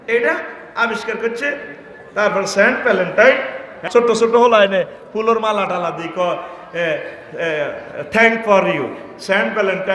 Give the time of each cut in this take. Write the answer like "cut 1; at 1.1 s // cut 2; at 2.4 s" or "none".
cut 1; at 3.7 s